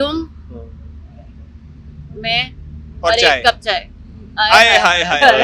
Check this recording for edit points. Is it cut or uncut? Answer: uncut